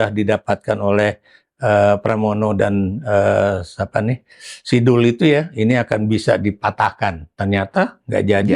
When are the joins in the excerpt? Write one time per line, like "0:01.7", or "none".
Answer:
none